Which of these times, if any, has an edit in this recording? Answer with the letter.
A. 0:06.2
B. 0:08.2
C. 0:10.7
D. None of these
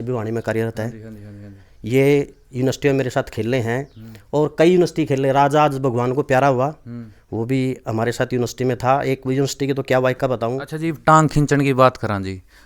C